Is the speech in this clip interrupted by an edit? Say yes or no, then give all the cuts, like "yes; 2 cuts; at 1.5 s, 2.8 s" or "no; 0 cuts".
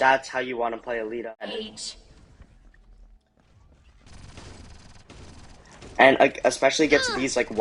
yes; 1 cut; at 1.5 s